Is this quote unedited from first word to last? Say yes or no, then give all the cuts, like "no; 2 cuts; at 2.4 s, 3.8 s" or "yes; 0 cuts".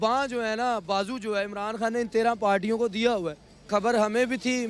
no; 1 cut; at 3.7 s